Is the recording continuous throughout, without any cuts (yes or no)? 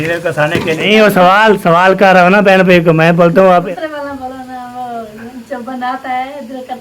no